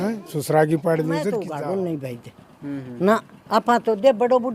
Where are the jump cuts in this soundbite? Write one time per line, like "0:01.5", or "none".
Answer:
0:01.4